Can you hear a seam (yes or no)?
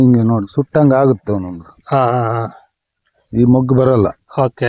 no